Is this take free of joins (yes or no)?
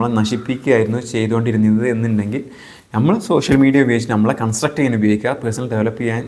yes